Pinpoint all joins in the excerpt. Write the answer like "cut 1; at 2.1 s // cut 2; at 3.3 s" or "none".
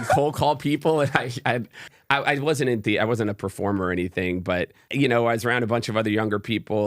cut 1; at 1.8 s // cut 2; at 4.8 s